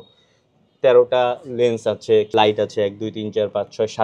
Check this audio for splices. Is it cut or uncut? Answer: cut